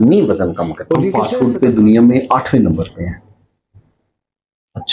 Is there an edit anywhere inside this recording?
yes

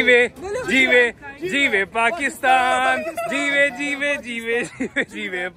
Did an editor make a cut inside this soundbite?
no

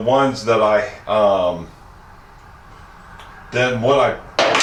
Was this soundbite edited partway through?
no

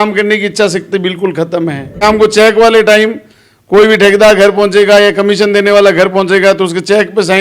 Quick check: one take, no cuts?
no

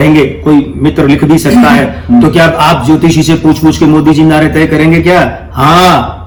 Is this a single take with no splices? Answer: yes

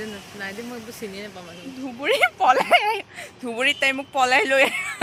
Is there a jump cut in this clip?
no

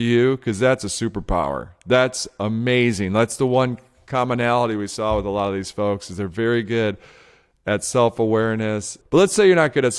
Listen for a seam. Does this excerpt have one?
yes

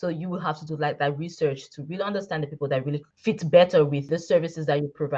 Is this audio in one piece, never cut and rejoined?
no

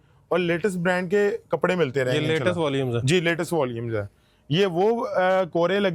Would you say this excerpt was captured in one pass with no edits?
yes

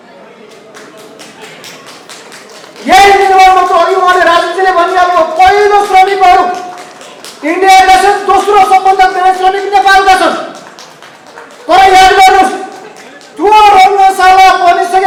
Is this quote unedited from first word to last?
yes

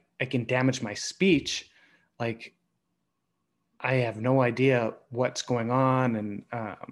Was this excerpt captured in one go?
yes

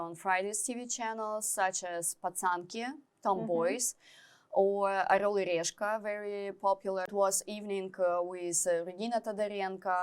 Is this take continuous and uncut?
no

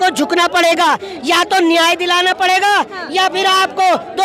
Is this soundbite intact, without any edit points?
yes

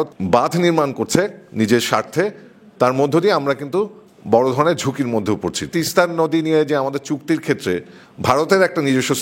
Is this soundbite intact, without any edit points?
no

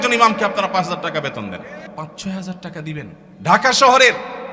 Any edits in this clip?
yes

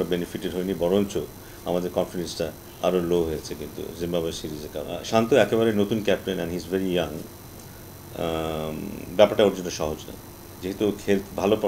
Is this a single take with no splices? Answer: no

